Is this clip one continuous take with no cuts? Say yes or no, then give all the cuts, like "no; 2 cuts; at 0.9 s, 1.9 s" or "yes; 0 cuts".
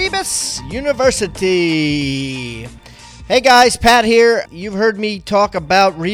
yes; 0 cuts